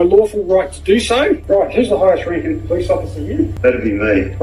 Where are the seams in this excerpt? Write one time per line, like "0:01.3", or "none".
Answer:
0:01.4
0:03.5